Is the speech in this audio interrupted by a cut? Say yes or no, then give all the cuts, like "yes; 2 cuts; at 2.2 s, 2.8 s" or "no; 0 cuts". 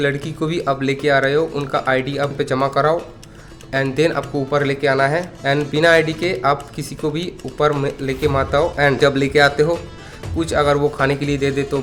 no; 0 cuts